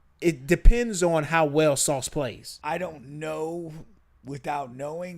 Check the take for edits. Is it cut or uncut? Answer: cut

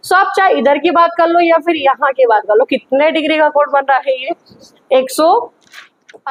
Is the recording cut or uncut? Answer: uncut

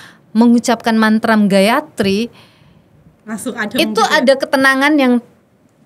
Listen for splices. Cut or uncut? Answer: uncut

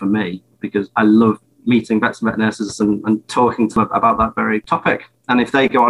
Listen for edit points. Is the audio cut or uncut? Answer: cut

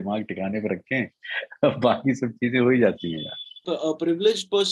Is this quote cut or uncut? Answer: cut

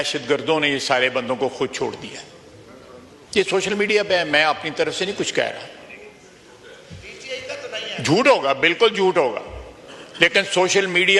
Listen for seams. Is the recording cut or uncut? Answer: uncut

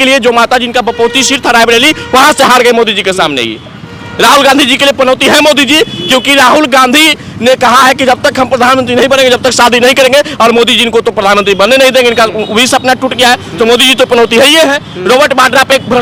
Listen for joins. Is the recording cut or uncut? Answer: uncut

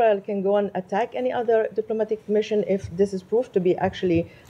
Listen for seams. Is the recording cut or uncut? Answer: uncut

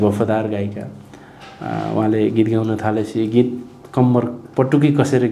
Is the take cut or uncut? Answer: uncut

